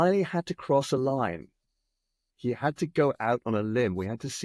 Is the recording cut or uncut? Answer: uncut